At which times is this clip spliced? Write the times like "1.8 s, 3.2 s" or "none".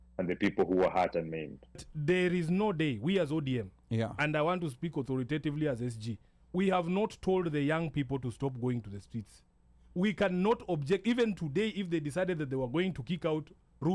1.9 s